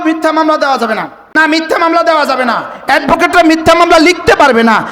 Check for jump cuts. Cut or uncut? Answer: cut